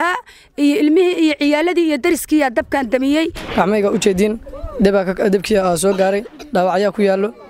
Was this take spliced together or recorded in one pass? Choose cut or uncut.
cut